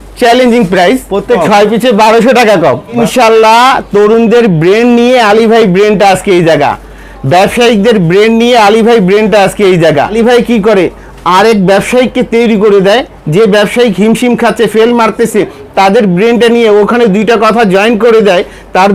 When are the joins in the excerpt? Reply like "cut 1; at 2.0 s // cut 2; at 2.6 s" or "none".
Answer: cut 1; at 1.4 s // cut 2; at 3.0 s // cut 3; at 10.1 s